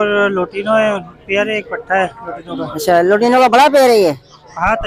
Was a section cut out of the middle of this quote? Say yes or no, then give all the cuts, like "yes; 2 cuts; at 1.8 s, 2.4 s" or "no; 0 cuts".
no; 0 cuts